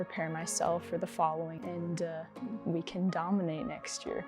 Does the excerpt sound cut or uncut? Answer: cut